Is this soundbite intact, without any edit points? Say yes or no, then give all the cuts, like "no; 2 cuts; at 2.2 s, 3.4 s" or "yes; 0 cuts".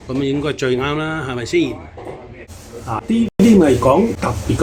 yes; 0 cuts